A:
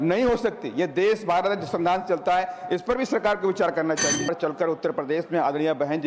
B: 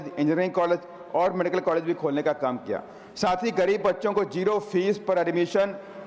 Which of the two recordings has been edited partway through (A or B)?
A